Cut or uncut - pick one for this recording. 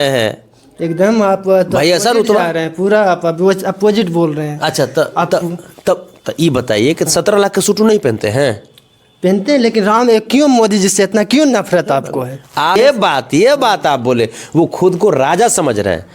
cut